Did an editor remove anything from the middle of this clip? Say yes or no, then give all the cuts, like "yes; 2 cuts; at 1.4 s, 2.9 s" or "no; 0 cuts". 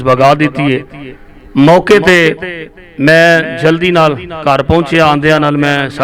no; 0 cuts